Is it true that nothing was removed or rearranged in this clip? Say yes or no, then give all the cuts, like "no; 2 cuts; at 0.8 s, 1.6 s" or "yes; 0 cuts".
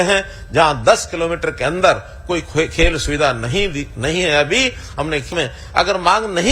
no; 1 cut; at 5.3 s